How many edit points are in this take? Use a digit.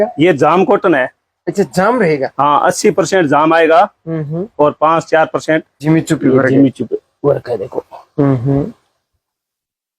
1